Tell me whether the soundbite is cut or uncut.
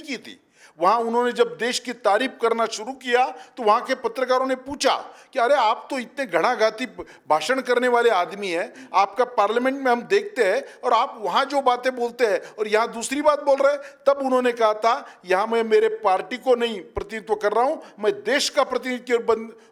uncut